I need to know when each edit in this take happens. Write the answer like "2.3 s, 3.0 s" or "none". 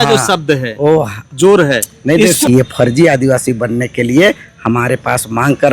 2.4 s